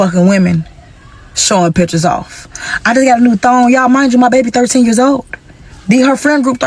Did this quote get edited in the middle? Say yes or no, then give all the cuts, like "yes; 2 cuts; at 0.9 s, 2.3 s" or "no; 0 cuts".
no; 0 cuts